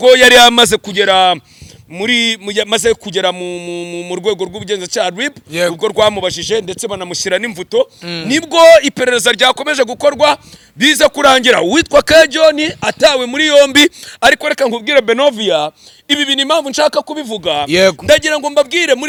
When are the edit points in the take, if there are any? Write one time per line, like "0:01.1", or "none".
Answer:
none